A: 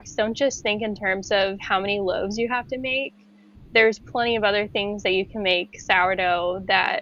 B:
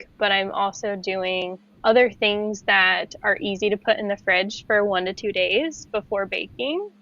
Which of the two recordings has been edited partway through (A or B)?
B